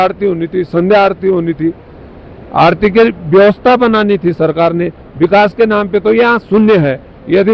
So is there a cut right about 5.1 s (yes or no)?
no